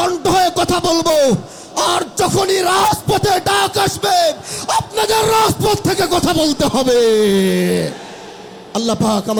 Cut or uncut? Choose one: uncut